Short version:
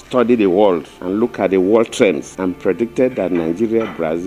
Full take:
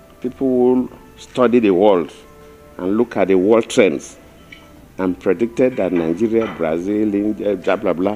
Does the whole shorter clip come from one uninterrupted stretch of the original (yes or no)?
no